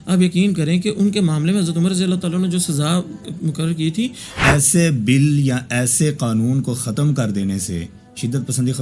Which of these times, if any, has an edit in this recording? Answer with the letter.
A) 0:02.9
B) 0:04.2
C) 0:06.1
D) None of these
B